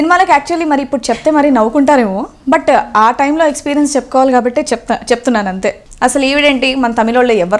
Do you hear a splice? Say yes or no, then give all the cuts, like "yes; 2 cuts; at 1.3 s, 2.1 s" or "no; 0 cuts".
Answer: yes; 1 cut; at 5.8 s